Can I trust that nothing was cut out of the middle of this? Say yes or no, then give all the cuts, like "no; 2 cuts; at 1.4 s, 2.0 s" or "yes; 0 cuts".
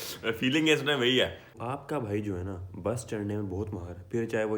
no; 1 cut; at 1.5 s